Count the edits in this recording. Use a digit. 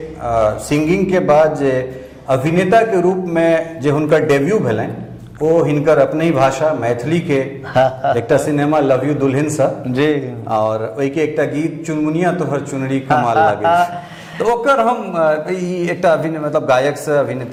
0